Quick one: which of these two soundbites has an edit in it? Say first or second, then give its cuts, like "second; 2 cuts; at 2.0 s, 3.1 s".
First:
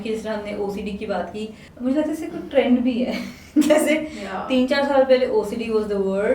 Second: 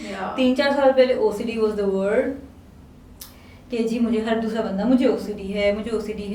first; 1 cut; at 1.6 s